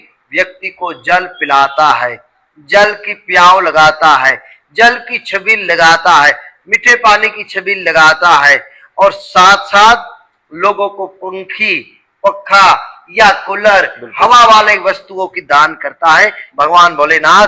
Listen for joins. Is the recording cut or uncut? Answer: cut